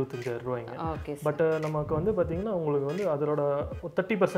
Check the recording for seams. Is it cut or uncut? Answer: uncut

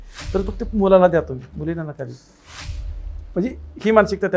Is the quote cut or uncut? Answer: uncut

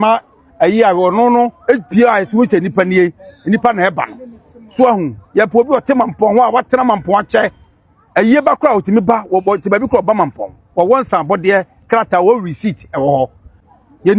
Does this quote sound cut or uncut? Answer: uncut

